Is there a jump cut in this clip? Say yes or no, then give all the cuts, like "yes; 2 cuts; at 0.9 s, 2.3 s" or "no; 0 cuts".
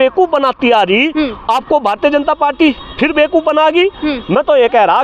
no; 0 cuts